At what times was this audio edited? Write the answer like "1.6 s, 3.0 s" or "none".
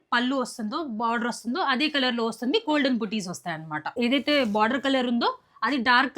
3.9 s